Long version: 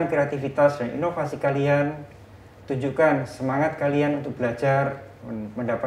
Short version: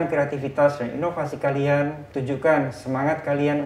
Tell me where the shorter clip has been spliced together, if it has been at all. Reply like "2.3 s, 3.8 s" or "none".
2.1 s